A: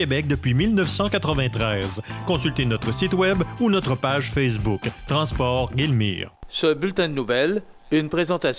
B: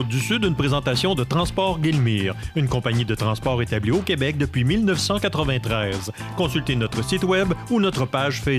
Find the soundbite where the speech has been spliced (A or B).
A